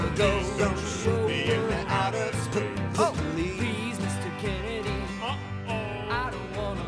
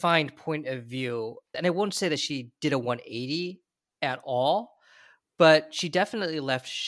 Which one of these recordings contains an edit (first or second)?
second